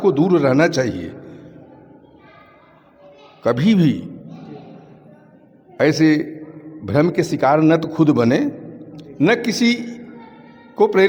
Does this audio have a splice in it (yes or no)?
no